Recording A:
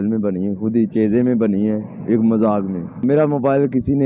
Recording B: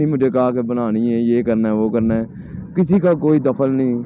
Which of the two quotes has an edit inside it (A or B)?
A